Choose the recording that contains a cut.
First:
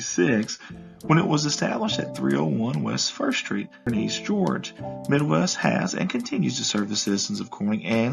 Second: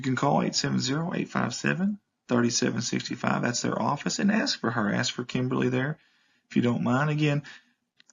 first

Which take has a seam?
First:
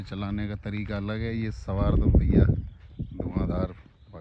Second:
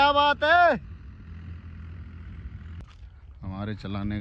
second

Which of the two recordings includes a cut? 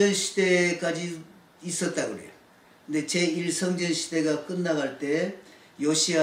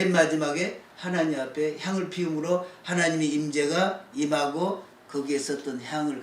second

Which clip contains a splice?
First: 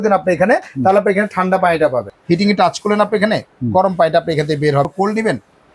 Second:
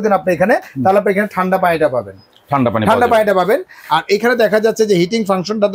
first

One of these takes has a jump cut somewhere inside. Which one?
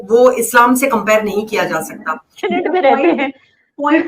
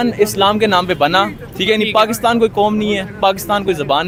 first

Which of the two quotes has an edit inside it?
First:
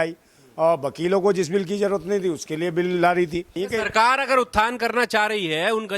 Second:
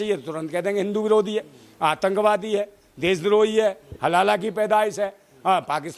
first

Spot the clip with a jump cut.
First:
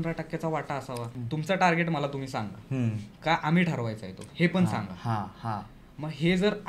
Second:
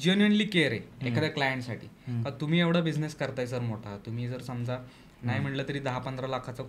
first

